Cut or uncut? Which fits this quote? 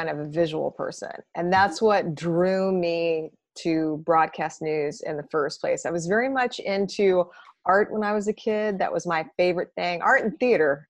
uncut